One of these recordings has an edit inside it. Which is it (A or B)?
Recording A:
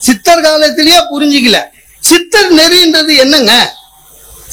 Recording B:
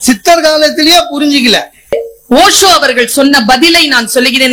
B